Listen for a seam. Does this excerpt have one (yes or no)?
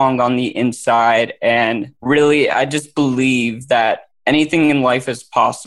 yes